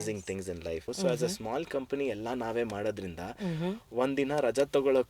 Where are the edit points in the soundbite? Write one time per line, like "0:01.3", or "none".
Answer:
0:00.9